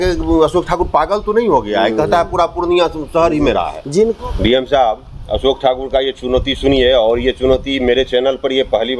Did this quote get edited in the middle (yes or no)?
yes